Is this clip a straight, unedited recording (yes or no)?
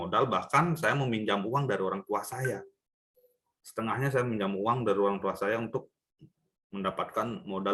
yes